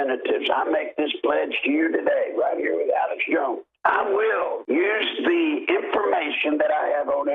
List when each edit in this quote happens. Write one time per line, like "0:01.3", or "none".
0:03.7
0:04.6